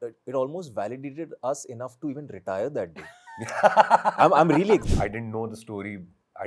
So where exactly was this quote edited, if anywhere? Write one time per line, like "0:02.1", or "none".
0:04.8